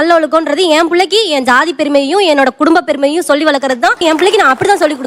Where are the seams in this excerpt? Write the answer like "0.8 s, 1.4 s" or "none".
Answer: none